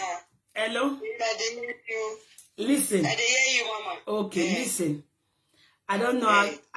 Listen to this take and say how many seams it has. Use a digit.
0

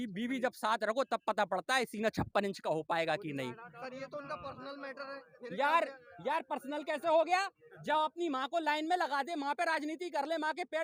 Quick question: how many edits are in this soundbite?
0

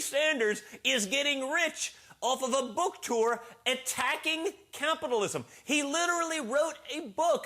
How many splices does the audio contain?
1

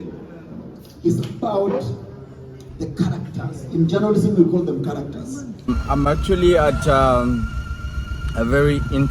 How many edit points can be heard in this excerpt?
1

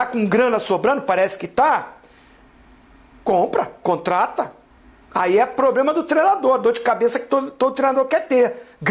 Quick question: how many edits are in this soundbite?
0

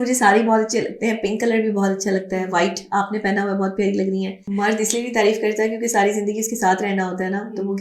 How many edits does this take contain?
1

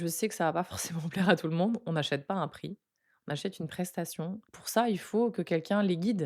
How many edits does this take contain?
1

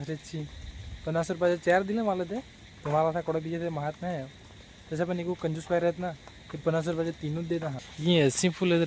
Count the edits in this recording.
1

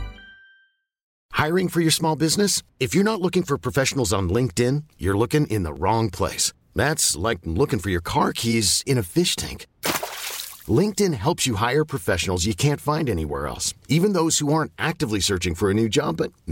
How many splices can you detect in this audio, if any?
1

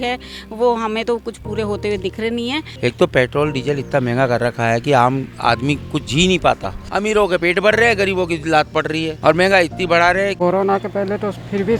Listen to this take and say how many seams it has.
4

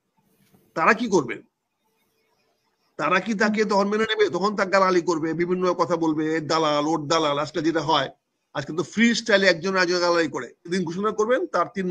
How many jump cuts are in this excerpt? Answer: 1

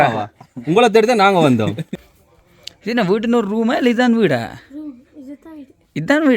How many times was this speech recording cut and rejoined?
1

